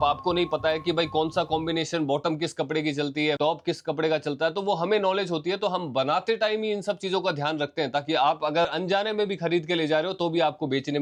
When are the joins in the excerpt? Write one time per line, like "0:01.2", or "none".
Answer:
none